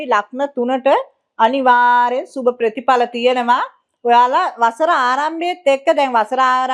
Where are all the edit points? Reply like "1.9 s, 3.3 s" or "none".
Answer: none

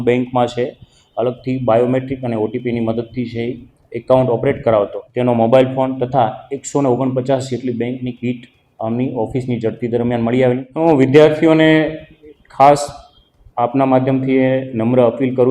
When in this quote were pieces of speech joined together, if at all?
5.0 s, 10.7 s

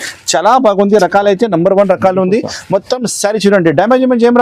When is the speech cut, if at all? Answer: none

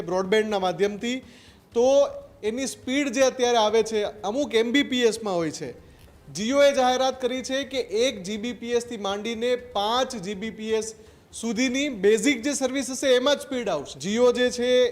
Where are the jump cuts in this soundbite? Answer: 13.9 s

